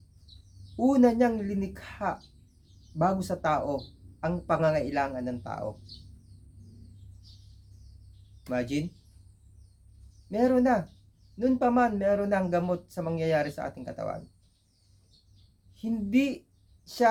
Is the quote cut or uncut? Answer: uncut